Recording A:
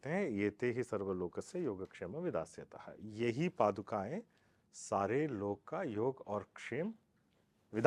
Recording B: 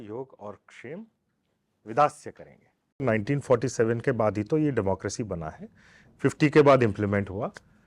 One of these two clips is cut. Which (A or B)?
B